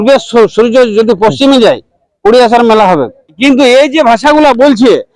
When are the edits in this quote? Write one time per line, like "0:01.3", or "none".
0:03.4